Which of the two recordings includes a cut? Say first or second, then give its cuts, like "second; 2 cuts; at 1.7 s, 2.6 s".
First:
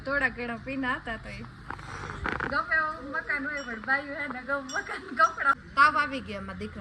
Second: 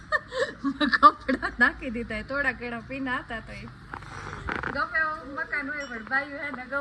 first; 1 cut; at 5.6 s